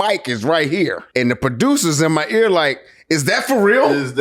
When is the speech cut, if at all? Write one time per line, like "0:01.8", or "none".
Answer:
0:01.0